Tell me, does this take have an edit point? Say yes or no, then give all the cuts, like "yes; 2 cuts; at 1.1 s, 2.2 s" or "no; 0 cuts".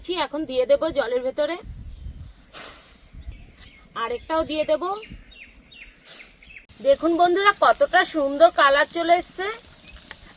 yes; 2 cuts; at 3.3 s, 6.7 s